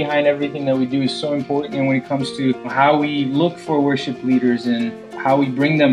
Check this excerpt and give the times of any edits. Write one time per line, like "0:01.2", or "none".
0:02.7